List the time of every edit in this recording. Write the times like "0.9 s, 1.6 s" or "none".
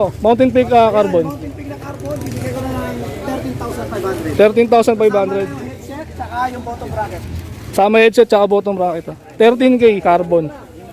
none